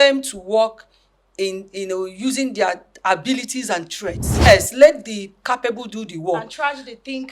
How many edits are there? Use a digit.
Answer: 1